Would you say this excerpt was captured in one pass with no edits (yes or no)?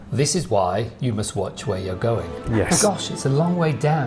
no